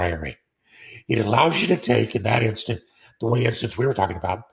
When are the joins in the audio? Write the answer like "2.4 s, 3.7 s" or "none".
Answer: none

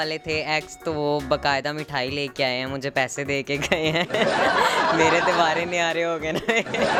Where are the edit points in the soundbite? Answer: none

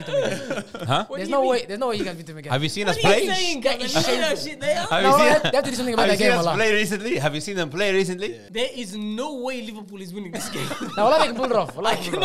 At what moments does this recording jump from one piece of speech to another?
8.3 s

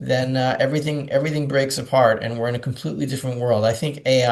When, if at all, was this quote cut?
none

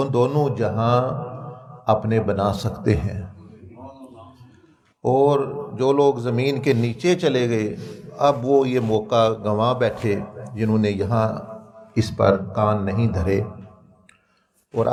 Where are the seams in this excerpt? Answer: none

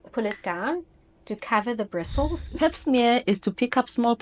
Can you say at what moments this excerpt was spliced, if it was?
2.5 s

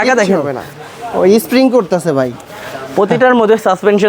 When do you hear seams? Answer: none

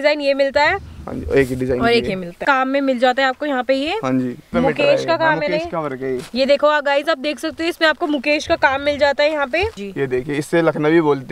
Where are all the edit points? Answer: 2.4 s, 4.4 s, 9.8 s

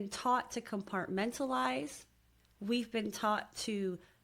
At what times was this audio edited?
2.5 s

